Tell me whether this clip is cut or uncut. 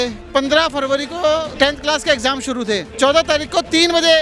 uncut